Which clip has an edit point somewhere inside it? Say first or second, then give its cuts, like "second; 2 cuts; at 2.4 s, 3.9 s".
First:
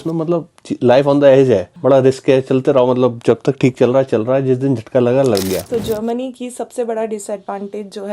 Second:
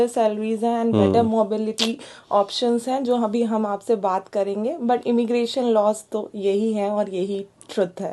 first; 2 cuts; at 1.7 s, 5.7 s